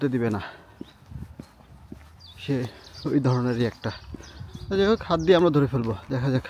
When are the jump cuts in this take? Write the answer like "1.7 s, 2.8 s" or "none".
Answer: none